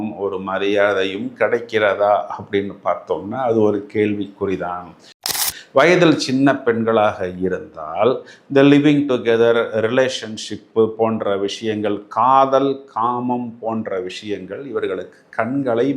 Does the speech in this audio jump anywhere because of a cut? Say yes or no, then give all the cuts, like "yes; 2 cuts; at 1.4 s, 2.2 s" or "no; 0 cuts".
yes; 1 cut; at 5.4 s